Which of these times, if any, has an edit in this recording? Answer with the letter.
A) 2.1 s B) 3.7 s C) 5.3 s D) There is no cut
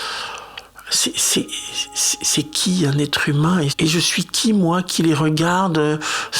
B